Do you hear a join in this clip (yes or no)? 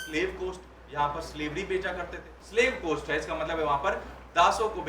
yes